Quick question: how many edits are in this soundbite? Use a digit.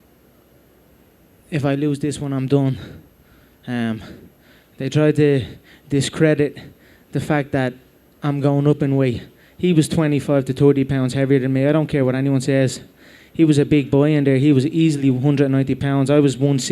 1